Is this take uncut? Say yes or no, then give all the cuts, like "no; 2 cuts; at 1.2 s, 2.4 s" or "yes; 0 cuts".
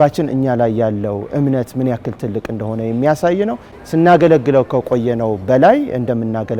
no; 1 cut; at 3.7 s